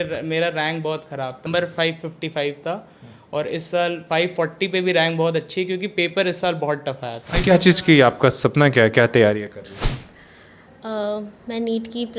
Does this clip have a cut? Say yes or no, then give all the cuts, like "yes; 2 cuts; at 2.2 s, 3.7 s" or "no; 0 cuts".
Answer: yes; 2 cuts; at 1.4 s, 7.4 s